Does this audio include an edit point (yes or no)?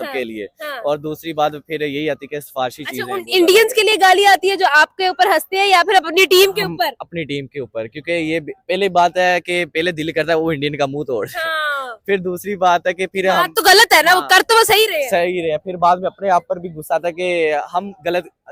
no